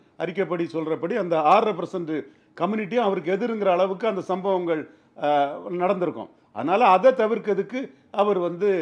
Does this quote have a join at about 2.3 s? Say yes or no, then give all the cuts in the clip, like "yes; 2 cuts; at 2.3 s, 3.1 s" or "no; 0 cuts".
no; 0 cuts